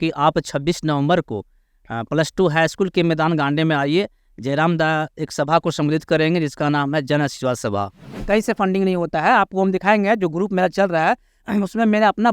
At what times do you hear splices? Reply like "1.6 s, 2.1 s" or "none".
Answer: 8.2 s